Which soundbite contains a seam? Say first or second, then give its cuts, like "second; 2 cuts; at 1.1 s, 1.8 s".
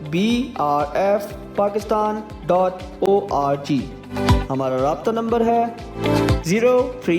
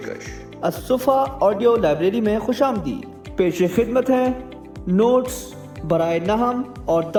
first; 1 cut; at 1.1 s